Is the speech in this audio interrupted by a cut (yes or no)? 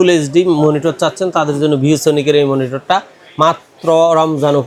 no